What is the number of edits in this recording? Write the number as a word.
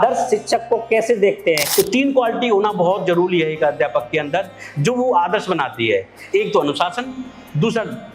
one